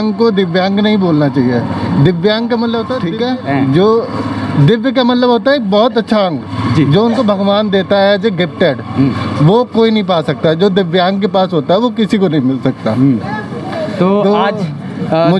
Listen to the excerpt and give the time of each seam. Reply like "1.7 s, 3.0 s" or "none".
3.0 s